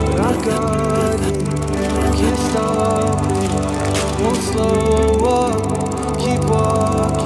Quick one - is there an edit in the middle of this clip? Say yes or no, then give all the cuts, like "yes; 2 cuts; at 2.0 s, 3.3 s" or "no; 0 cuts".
no; 0 cuts